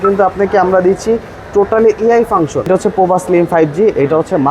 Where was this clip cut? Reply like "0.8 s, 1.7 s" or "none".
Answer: 2.7 s